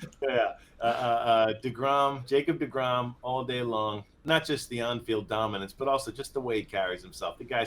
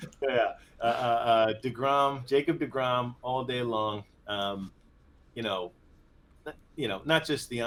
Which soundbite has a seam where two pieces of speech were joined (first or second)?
first